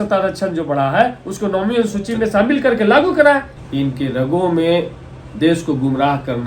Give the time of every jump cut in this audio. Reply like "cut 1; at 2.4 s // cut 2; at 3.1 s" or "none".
cut 1; at 3.5 s